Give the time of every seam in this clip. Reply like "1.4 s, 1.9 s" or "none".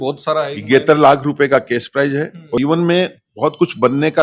2.6 s